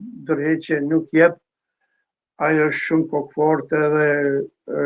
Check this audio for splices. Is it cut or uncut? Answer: uncut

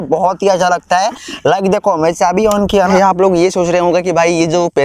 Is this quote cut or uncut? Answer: cut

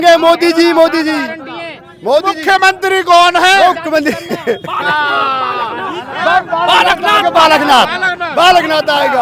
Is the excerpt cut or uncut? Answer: uncut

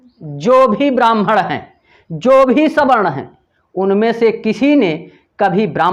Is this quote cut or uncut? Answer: uncut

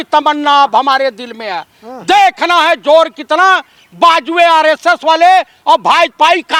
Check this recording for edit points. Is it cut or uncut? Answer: uncut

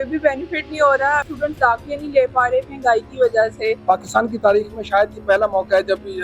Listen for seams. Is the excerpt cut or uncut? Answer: cut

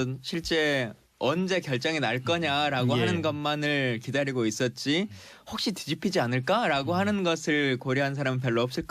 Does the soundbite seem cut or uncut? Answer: cut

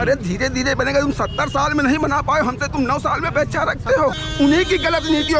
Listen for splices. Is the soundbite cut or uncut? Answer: cut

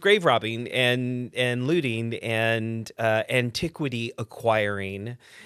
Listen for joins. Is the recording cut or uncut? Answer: uncut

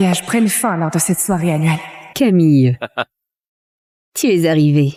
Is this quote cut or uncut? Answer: uncut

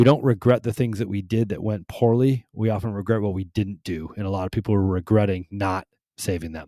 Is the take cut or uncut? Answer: uncut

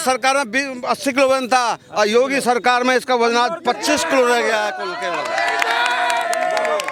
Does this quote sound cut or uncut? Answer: uncut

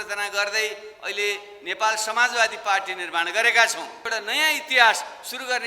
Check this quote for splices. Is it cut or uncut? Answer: cut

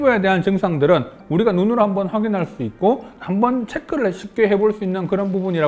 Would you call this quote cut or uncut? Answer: uncut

